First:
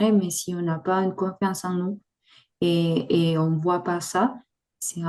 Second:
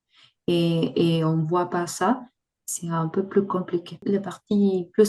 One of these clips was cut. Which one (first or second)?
second